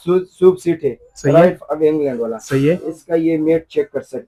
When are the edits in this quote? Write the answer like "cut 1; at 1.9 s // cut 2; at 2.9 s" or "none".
none